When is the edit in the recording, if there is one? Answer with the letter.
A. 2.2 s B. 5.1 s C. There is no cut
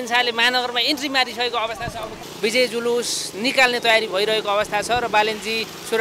A